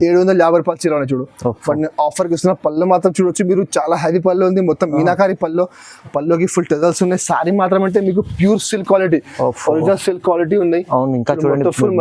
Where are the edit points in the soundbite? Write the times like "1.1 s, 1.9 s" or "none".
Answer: none